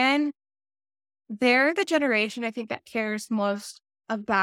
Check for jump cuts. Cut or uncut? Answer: uncut